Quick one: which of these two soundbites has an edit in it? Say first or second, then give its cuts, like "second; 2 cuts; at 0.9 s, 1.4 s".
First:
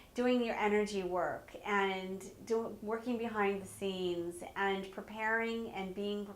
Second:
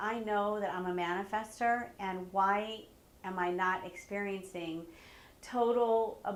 first; 1 cut; at 3.6 s